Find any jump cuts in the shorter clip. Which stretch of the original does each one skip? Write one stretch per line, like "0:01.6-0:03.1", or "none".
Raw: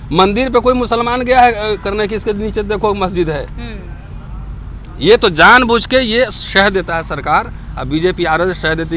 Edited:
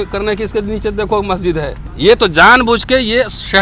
0:03.5-0:04.8